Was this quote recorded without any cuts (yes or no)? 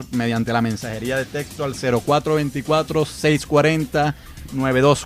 no